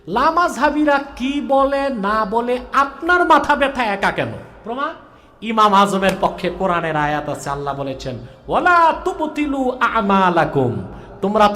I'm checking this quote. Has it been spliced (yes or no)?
yes